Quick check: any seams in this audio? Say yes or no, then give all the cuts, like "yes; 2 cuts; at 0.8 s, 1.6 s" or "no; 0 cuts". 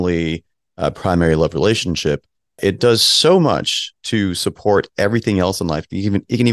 no; 0 cuts